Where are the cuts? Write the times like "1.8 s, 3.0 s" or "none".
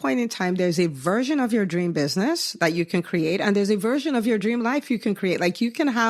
none